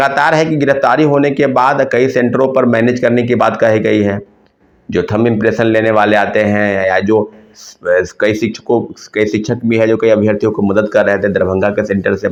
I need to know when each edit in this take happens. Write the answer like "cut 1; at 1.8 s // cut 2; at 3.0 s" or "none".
none